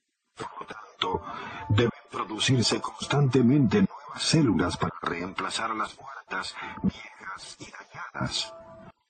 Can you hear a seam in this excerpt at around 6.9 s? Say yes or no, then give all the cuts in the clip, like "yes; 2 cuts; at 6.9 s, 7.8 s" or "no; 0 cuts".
yes; 1 cut; at 6.9 s